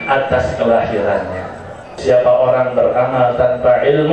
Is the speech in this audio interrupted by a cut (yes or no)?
yes